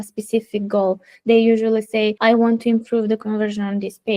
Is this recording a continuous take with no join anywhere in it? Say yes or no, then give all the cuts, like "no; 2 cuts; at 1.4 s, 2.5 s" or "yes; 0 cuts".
no; 1 cut; at 2.2 s